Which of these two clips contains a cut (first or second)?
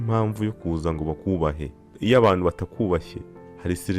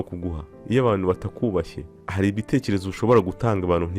first